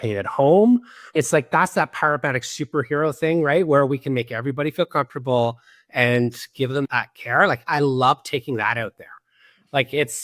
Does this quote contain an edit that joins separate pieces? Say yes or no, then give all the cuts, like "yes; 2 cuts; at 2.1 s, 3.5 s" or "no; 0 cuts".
yes; 2 cuts; at 1.1 s, 6.9 s